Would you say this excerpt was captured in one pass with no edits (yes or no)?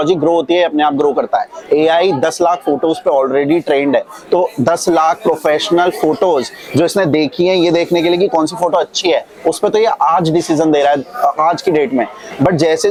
yes